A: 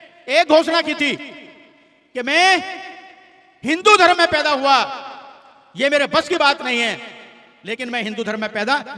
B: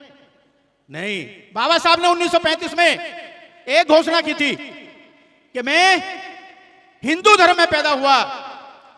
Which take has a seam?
B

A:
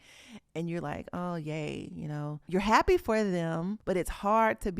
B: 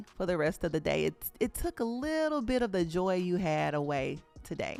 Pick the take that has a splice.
A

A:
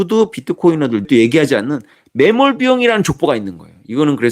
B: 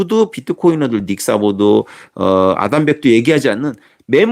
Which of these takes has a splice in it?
A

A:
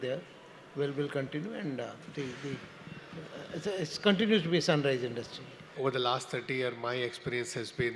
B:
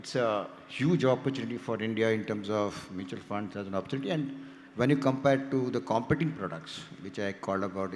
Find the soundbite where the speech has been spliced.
A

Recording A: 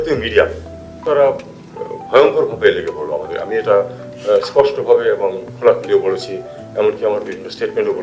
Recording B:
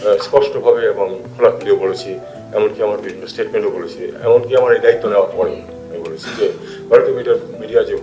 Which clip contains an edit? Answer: A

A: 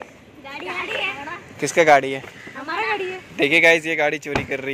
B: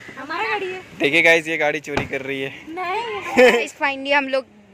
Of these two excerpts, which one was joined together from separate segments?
B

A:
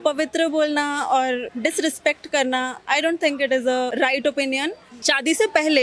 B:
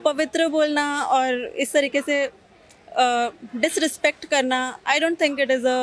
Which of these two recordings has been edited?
A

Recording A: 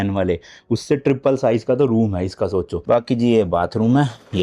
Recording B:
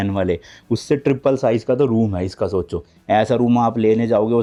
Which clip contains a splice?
A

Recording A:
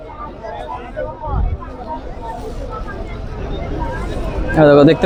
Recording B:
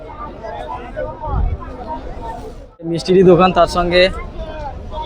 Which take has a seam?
B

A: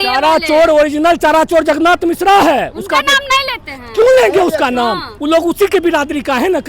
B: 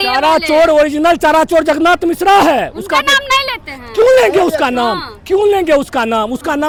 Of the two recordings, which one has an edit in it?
A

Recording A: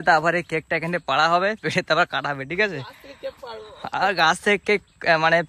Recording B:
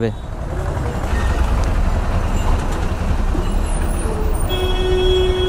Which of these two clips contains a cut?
B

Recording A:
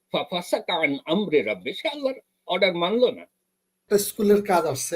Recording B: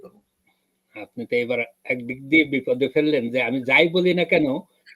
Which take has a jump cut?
A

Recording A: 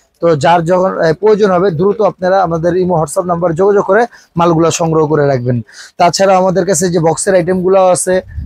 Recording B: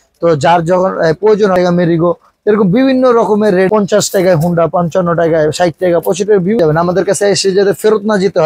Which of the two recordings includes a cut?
B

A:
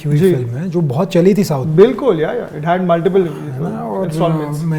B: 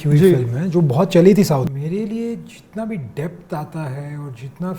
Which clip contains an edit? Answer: B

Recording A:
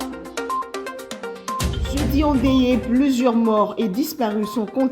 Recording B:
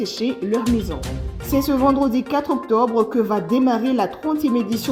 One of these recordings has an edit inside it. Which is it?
A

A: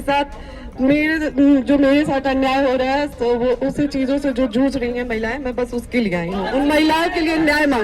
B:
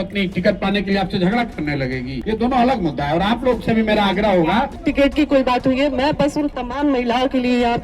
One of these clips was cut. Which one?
B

